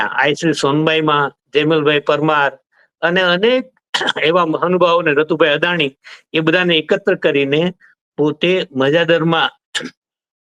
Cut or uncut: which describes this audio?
uncut